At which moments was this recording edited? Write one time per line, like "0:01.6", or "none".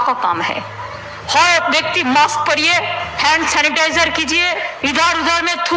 0:03.1
0:04.7